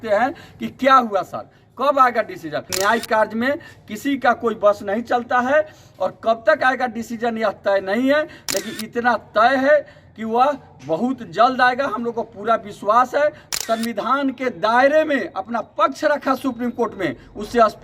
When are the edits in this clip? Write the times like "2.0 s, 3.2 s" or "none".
2.7 s, 13.5 s